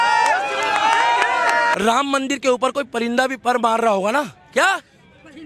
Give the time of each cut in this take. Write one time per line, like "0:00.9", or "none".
0:01.7